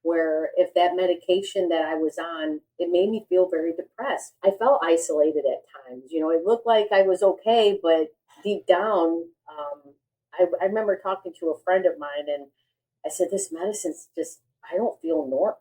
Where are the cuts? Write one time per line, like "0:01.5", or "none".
0:02.6
0:04.3